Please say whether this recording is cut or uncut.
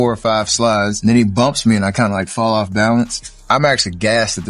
cut